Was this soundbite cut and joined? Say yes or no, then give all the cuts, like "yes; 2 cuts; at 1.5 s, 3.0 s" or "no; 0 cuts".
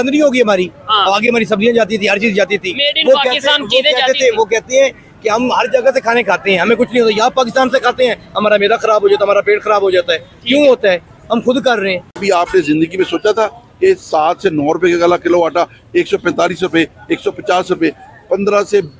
yes; 1 cut; at 12.2 s